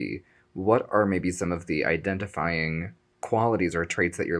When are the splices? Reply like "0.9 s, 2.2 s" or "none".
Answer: none